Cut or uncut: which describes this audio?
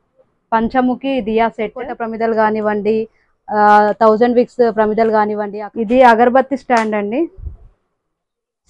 cut